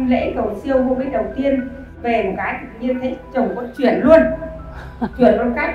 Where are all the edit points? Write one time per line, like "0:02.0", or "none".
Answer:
0:02.0